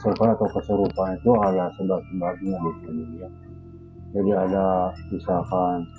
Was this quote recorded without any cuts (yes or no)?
yes